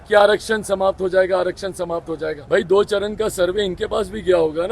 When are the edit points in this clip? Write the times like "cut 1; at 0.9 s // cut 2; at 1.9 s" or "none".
cut 1; at 2.4 s